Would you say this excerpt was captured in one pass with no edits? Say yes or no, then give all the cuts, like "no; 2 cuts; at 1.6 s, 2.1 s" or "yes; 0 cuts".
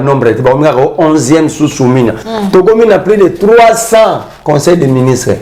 no; 1 cut; at 2.3 s